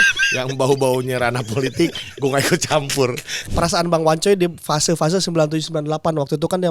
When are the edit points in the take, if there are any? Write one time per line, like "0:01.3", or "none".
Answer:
0:03.4